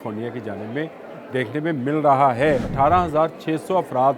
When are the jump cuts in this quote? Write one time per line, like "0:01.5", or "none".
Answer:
0:02.7